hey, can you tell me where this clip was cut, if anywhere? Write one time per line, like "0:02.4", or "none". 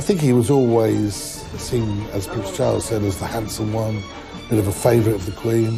none